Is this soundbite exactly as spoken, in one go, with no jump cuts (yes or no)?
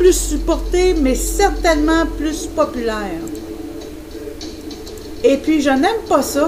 yes